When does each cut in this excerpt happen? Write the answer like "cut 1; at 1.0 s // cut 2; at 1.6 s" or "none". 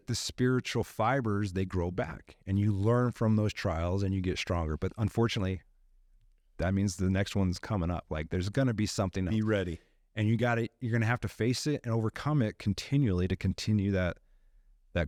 none

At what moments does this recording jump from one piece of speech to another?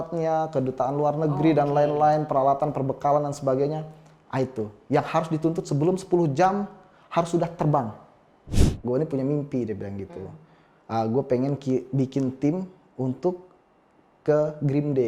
cut 1; at 8.6 s

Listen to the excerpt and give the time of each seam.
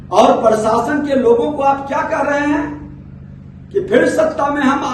none

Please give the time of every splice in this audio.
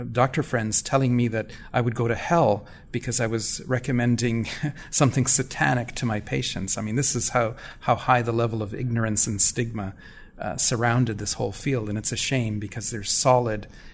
none

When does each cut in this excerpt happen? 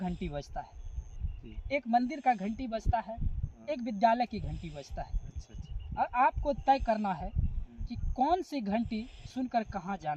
none

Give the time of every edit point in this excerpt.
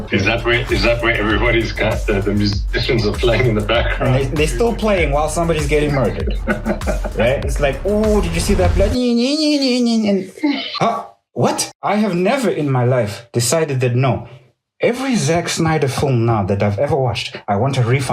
cut 1; at 10.7 s // cut 2; at 11.7 s

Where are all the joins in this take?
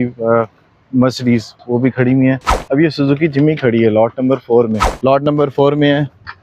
cut 1; at 4.9 s

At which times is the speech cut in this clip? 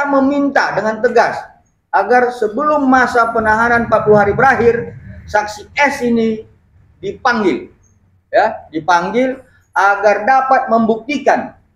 none

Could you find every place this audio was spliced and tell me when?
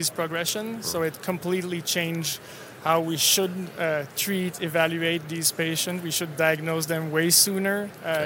none

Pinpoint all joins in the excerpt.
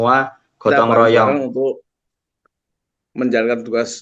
cut 1; at 1.2 s

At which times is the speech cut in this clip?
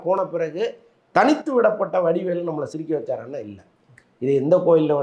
none

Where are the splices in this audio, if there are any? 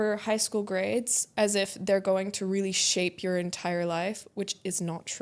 none

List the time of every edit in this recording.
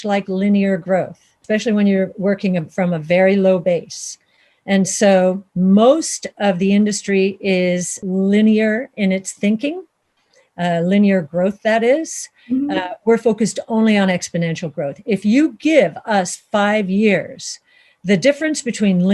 cut 1; at 1.4 s // cut 2; at 8.0 s

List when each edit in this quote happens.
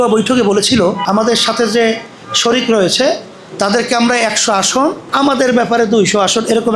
cut 1; at 1.0 s // cut 2; at 5.0 s

